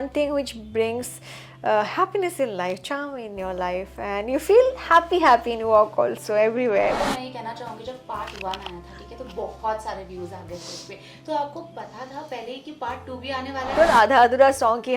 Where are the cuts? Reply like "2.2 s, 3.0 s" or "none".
7.0 s, 13.7 s